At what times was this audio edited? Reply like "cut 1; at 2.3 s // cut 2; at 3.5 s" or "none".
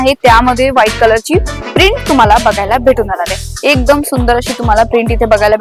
none